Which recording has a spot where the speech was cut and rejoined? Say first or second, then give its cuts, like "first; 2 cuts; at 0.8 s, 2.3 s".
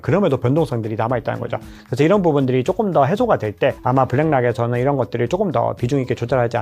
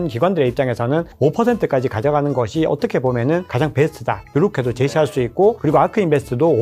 first; 1 cut; at 3.8 s